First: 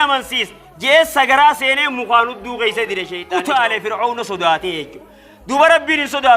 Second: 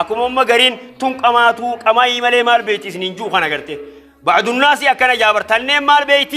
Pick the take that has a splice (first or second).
first